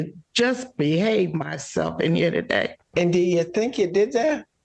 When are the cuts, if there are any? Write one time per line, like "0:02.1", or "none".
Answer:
0:02.8